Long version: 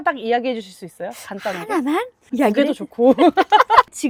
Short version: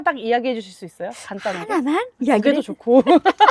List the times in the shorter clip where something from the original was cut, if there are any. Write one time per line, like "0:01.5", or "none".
0:02.1